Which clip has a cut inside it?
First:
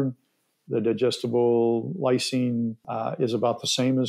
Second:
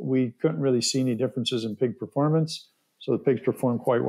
first; 1 cut; at 2.8 s

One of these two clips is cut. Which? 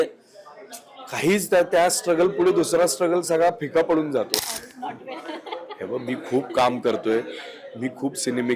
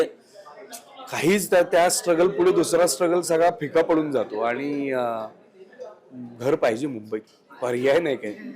first; 1 cut; at 4.3 s

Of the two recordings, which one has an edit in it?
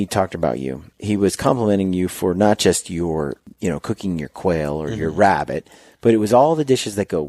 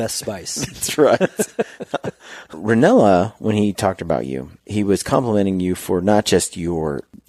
second; 1 cut; at 2.5 s

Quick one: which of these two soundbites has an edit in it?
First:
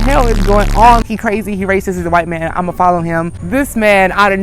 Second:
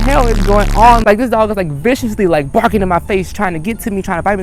first; 2 cuts; at 1.0 s, 3.4 s

